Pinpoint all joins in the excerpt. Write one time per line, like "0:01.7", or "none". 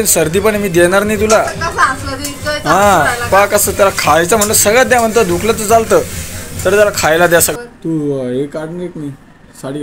0:07.5